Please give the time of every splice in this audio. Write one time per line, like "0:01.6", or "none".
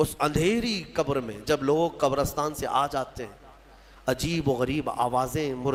none